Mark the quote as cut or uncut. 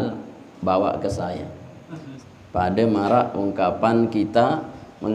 cut